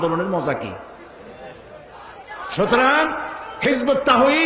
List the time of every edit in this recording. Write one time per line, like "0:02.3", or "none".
0:02.3